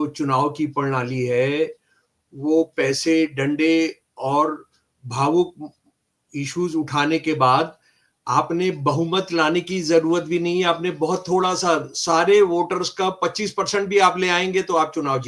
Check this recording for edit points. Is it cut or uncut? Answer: uncut